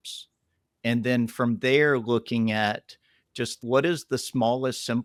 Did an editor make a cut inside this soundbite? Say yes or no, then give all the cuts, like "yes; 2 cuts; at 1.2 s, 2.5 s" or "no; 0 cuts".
no; 0 cuts